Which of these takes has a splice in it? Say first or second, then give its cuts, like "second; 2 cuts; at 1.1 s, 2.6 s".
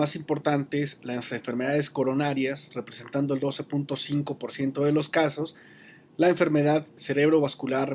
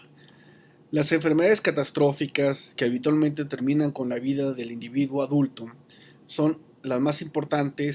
first; 1 cut; at 4.5 s